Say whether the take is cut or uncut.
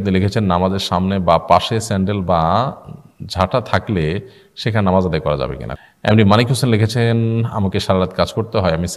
cut